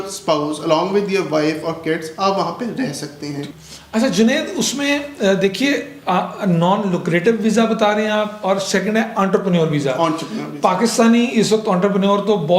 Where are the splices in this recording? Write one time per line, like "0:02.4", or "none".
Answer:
none